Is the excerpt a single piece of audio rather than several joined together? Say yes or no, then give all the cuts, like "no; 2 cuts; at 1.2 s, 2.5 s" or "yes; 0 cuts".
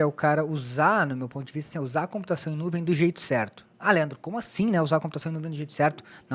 yes; 0 cuts